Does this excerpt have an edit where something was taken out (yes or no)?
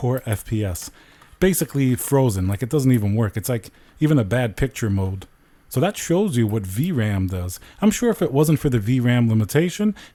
no